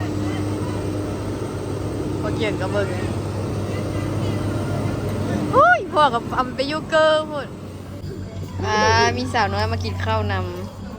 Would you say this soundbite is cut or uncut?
cut